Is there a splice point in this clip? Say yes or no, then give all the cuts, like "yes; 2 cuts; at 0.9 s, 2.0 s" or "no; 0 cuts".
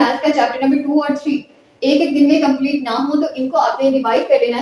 no; 0 cuts